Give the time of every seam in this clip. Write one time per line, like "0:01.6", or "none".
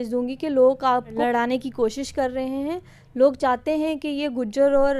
0:01.1